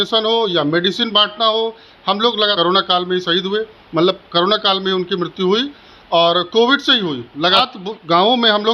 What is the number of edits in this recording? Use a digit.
2